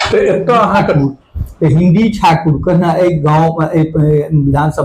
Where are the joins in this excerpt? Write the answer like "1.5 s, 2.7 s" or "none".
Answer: 1.0 s